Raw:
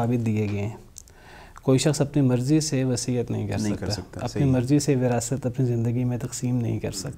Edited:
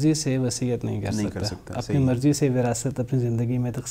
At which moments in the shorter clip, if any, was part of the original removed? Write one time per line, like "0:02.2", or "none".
none